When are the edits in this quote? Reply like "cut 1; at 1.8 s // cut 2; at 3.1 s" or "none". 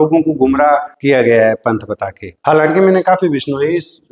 cut 1; at 2.3 s